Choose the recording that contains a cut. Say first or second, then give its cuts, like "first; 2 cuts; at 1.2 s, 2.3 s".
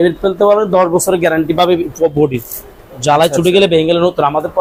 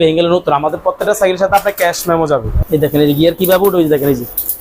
second; 1 cut; at 2.5 s